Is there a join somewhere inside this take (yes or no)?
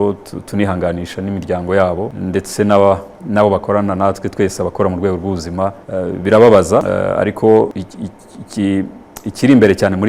yes